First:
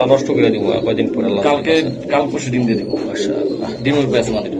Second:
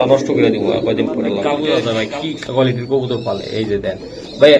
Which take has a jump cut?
second; 1 cut; at 1.8 s

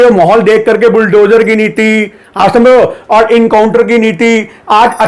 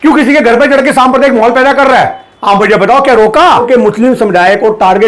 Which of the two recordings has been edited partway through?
second; 1 cut; at 3.6 s

